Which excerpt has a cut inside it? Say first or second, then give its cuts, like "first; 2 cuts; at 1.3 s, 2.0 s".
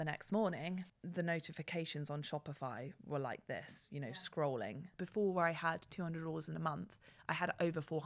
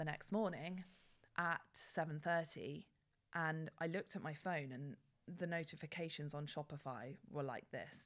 first; 2 cuts; at 1.0 s, 4.9 s